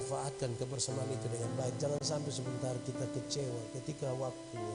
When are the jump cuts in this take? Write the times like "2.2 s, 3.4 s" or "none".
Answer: none

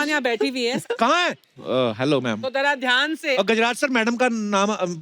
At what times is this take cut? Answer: 1.3 s, 3.4 s

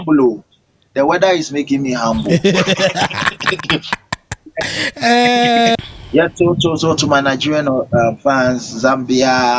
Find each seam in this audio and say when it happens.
5.8 s

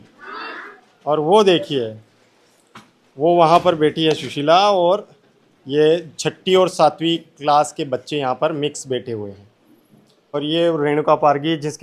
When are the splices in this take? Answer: 10.3 s

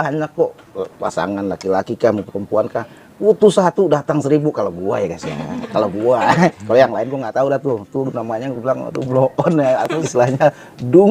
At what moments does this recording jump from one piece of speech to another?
10.0 s

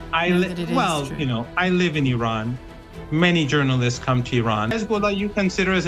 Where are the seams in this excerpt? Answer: 4.7 s

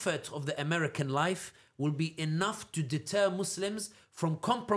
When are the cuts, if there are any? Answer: none

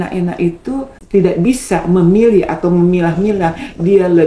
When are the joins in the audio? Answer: 1.0 s

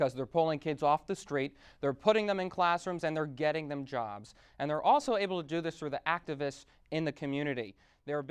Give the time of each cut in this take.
none

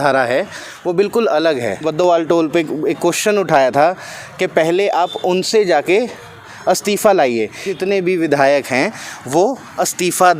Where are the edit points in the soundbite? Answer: 1.8 s, 7.7 s

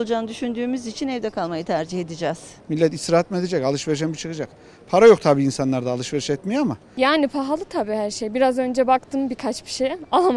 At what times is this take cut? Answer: 2.5 s, 6.8 s

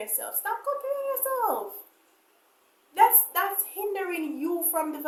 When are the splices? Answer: none

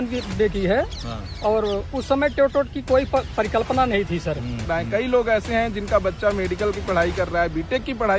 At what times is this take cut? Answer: 4.6 s

